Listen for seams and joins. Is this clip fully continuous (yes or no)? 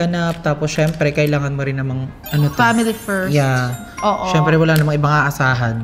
yes